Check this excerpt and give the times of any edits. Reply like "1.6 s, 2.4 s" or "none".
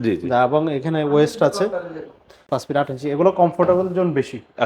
2.4 s